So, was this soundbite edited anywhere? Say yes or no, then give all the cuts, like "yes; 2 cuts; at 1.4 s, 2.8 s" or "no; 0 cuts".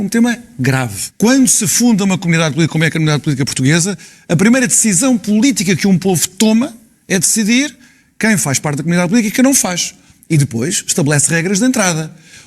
yes; 1 cut; at 1.0 s